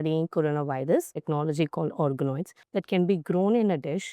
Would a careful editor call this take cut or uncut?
cut